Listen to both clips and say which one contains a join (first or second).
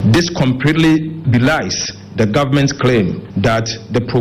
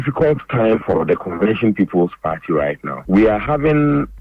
first